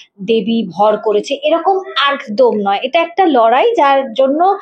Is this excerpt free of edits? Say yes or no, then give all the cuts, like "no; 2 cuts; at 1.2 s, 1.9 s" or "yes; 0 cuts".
yes; 0 cuts